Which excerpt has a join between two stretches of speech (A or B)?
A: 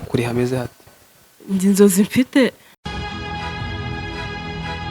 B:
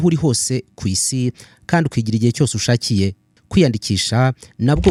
A